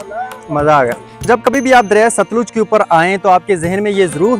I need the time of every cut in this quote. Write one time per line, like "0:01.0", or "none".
0:01.3